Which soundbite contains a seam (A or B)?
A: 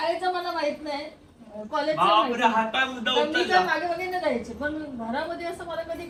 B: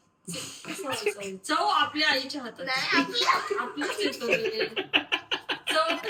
B